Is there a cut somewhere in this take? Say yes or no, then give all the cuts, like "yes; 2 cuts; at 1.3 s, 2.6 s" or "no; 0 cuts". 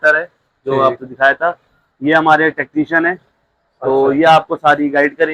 no; 0 cuts